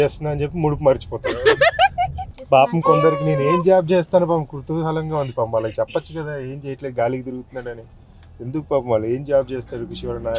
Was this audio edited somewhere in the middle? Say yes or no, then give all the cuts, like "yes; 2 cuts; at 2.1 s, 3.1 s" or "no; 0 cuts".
yes; 1 cut; at 2.3 s